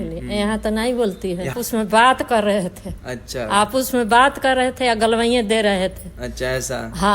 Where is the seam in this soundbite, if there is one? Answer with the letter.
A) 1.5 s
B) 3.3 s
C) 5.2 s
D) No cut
A